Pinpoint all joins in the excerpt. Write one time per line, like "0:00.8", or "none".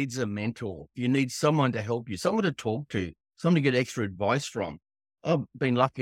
0:00.9
0:05.1